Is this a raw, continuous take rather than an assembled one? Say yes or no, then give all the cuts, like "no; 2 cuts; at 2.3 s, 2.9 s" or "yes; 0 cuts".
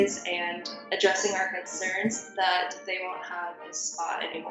yes; 0 cuts